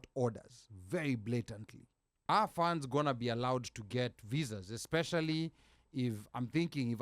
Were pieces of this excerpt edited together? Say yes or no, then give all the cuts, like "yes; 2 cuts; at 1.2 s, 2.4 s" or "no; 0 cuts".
yes; 1 cut; at 2.3 s